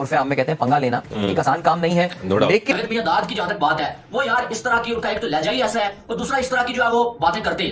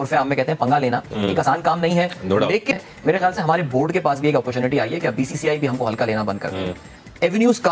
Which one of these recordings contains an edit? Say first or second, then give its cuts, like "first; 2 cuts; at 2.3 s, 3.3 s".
first; 1 cut; at 2.7 s